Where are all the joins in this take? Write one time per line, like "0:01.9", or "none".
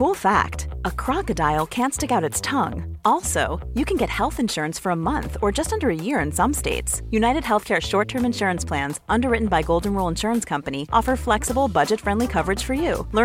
none